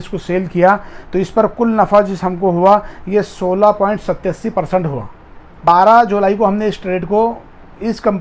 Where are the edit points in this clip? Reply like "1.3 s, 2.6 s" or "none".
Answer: 5.6 s